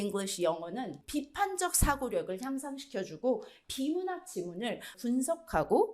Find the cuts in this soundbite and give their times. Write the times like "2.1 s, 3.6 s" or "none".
1.0 s, 3.6 s, 4.9 s